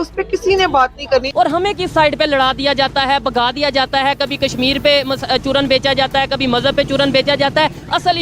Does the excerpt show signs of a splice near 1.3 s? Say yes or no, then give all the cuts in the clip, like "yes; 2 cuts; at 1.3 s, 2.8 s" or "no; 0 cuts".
yes; 1 cut; at 1.3 s